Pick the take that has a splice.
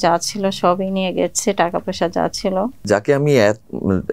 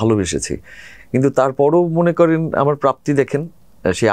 first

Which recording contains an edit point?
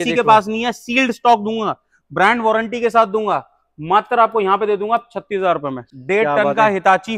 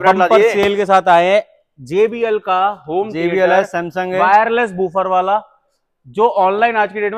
first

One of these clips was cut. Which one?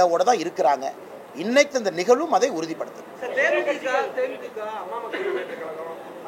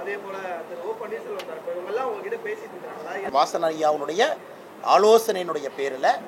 second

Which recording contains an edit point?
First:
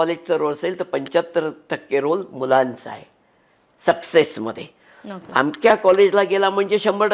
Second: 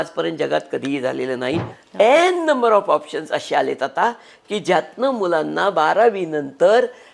second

